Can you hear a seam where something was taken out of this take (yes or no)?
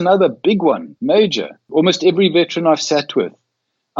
yes